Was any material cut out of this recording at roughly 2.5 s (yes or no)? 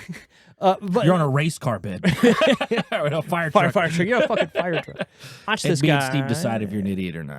no